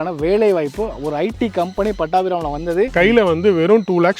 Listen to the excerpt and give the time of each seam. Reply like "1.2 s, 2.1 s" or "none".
2.9 s